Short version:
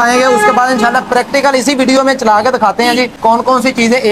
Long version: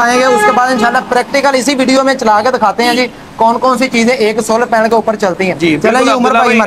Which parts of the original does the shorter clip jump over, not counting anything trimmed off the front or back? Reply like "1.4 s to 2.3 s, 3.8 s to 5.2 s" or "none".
3.1 s to 3.3 s